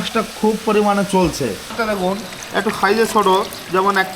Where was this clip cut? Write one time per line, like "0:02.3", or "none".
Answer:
0:01.8